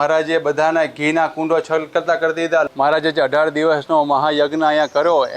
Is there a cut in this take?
yes; 1 cut; at 2.7 s

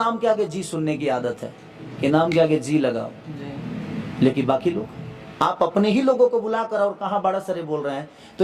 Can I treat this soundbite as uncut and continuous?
yes; 0 cuts

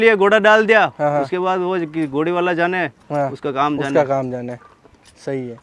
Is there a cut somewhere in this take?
no; 0 cuts

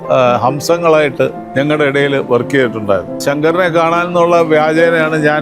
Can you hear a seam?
yes; 2 cuts; at 1.4 s, 3.1 s

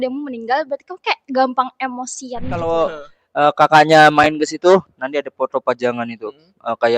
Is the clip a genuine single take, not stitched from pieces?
no; 1 cut; at 2.5 s

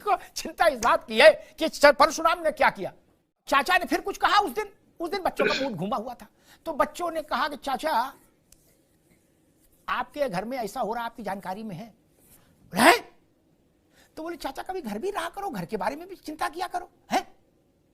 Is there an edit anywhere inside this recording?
yes; 1 cut; at 3.4 s

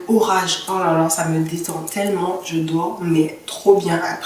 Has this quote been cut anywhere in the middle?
no; 0 cuts

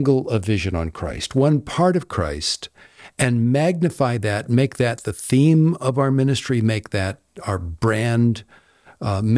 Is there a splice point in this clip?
no; 0 cuts

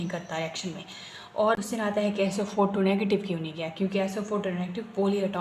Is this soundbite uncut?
no; 1 cut; at 1.6 s

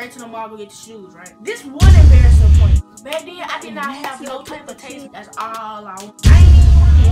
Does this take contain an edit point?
yes; 3 cuts; at 1.4 s, 5.1 s, 6.1 s

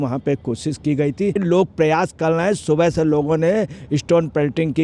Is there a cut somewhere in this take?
yes; 1 cut; at 1.4 s

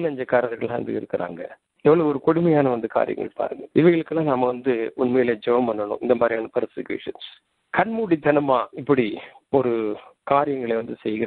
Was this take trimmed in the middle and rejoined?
no; 0 cuts

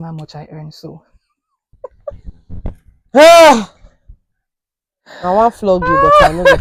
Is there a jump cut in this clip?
no; 0 cuts

